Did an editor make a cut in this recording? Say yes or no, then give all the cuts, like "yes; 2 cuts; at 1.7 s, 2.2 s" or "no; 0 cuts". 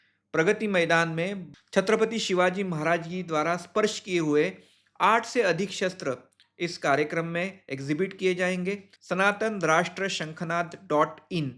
yes; 2 cuts; at 1.4 s, 8.9 s